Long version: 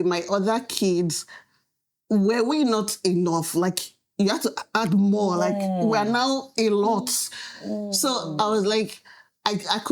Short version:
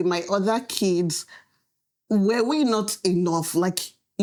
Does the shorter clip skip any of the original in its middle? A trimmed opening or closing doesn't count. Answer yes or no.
no